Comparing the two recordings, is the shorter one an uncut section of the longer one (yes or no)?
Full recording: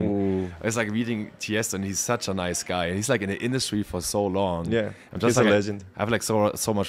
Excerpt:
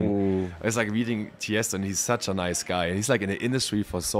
yes